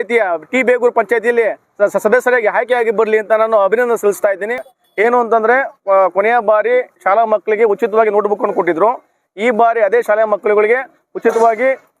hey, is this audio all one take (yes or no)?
no